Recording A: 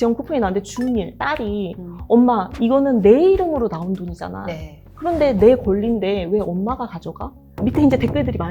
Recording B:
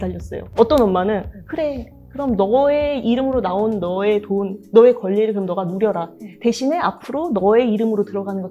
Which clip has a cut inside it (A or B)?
A